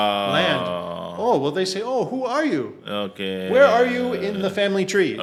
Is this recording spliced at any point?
no; 0 cuts

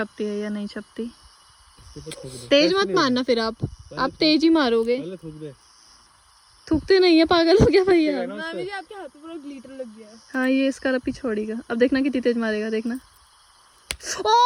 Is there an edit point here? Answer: no; 0 cuts

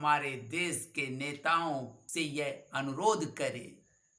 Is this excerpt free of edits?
no; 1 cut; at 2.0 s

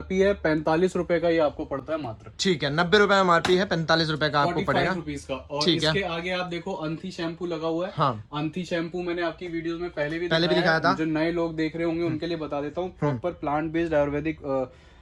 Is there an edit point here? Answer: no; 0 cuts

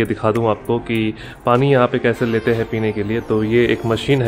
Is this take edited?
no; 0 cuts

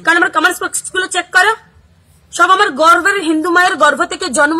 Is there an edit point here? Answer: yes; 2 cuts; at 1.6 s, 3.2 s

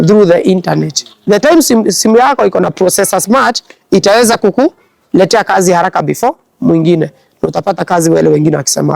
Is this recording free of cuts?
yes; 0 cuts

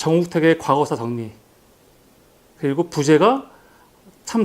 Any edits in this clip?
yes; 1 cut; at 3.2 s

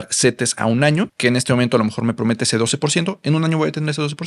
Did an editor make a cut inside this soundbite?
no; 0 cuts

